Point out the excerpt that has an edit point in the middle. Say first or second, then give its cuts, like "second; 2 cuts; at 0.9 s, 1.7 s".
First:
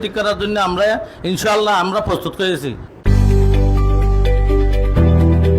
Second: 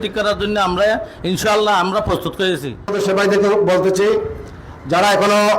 second; 1 cut; at 2.9 s